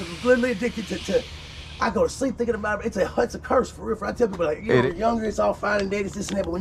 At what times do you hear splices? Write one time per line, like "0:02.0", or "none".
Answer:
0:04.8